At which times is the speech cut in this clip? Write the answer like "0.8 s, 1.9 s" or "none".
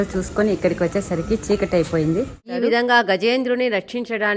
2.4 s